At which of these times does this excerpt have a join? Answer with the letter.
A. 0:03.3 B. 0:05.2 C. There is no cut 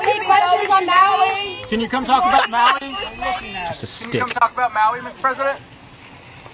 C